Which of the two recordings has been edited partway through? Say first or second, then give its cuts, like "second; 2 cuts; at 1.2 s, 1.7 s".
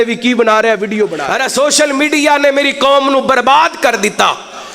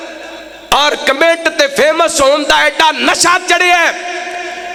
first; 1 cut; at 1.2 s